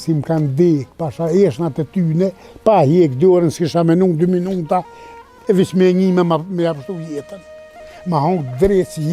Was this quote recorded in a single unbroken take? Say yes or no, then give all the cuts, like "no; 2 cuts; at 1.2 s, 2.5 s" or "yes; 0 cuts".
yes; 0 cuts